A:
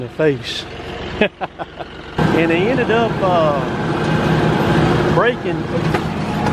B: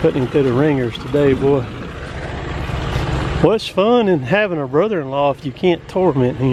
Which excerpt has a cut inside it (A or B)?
A